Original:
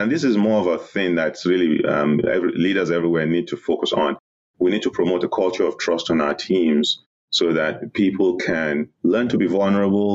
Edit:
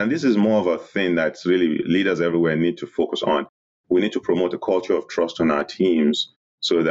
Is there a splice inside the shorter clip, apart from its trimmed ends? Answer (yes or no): yes